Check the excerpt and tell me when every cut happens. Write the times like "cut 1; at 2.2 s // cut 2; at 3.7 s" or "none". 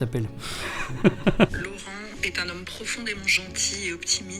cut 1; at 1.5 s